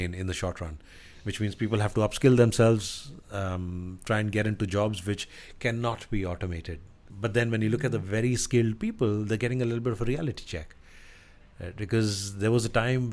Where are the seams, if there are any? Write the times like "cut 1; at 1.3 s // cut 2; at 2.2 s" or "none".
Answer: cut 1; at 7.0 s